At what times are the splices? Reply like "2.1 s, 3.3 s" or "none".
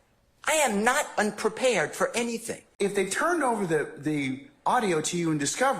2.6 s